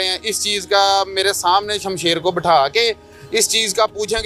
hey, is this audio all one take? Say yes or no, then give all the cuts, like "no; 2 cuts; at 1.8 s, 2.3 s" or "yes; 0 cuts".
yes; 0 cuts